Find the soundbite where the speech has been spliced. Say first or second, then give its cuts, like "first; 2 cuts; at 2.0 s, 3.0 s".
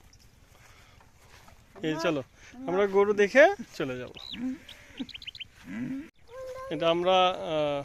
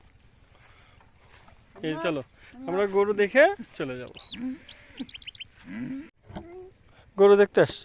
second; 1 cut; at 6.2 s